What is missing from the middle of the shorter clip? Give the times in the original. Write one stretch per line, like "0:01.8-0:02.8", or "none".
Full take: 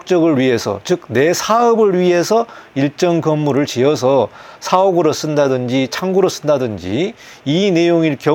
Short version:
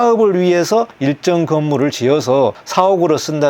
0:02.5-0:02.7
0:04.4-0:04.6